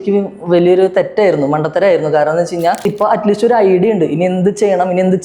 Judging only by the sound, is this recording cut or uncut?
cut